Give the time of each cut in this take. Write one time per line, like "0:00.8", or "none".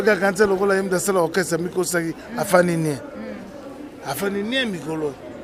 none